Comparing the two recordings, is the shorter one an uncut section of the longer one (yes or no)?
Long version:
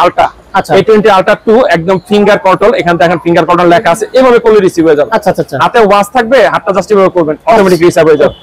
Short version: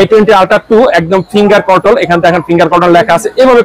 yes